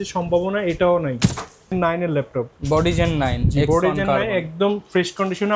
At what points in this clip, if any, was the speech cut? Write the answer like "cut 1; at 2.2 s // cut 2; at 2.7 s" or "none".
cut 1; at 1.7 s

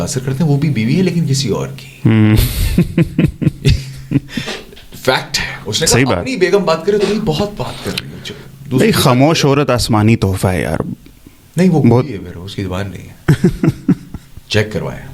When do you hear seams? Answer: none

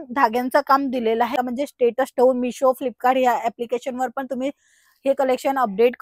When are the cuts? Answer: cut 1; at 1.3 s

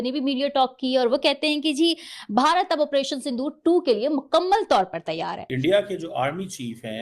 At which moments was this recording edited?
cut 1; at 5.4 s

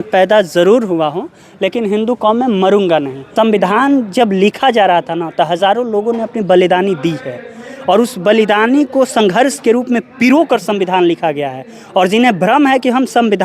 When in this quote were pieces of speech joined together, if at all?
cut 1; at 3.2 s

